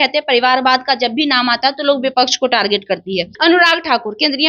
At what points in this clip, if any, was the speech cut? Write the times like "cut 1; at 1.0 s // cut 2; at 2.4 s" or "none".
cut 1; at 3.3 s